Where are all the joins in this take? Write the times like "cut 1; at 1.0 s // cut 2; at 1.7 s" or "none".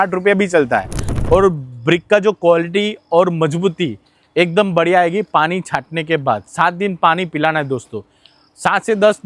cut 1; at 1.0 s